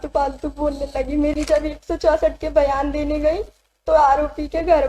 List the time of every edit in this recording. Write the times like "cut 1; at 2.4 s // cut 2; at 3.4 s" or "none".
cut 1; at 1.3 s